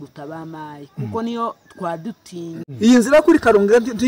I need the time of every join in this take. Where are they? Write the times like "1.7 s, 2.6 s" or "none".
2.6 s